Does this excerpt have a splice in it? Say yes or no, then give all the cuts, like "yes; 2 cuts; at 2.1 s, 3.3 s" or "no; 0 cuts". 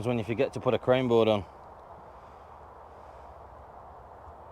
no; 0 cuts